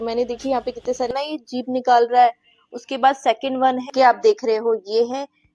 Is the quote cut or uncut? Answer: cut